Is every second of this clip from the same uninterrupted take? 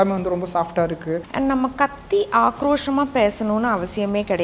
no; 1 cut; at 1.3 s

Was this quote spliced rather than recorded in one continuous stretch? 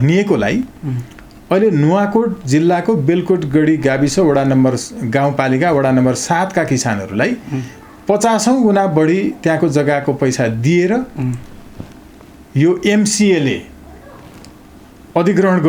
no; 0 cuts

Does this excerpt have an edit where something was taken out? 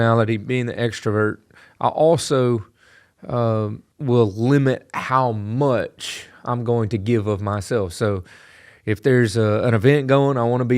yes; 1 cut; at 3.9 s

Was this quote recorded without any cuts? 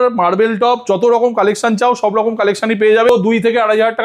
no; 1 cut; at 3.1 s

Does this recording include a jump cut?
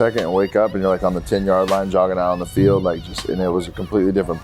no; 0 cuts

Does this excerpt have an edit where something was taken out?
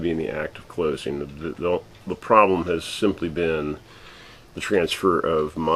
no; 0 cuts

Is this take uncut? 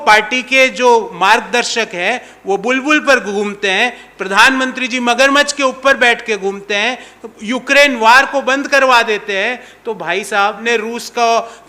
no; 1 cut; at 10.6 s

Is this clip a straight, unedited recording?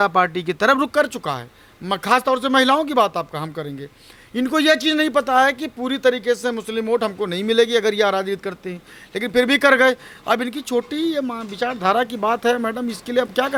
yes; 0 cuts

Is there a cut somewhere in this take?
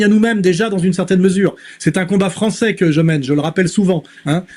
no; 0 cuts

